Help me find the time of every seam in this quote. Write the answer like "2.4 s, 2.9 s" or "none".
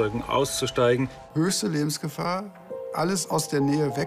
1.2 s